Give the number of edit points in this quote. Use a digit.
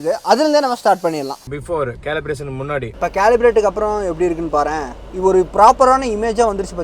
1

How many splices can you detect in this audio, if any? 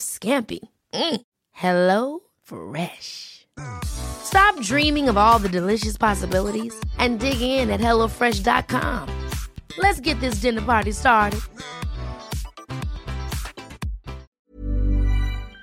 1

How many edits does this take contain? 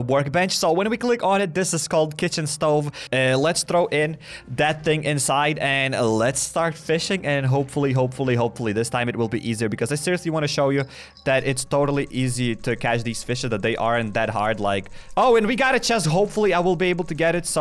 2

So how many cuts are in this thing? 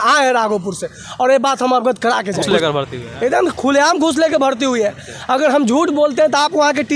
1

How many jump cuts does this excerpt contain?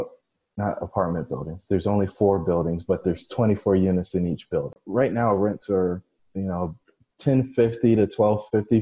1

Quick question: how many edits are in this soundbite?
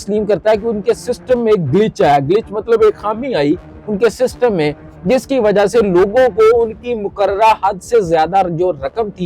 0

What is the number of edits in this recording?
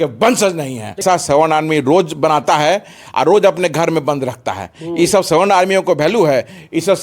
1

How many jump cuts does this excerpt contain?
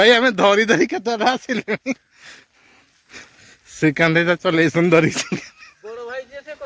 0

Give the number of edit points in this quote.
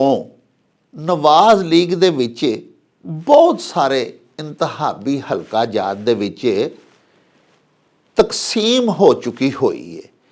0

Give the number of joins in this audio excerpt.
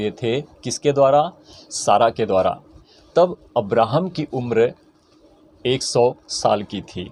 0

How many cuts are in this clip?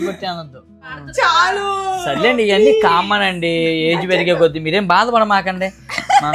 1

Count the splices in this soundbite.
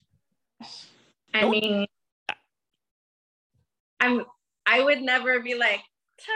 1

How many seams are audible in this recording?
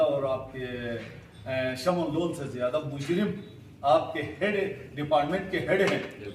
0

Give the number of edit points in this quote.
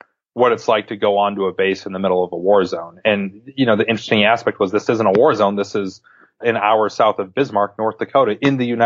1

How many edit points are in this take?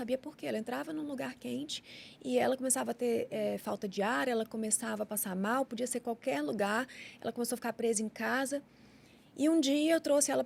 0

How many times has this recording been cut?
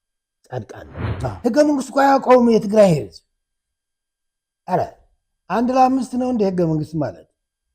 1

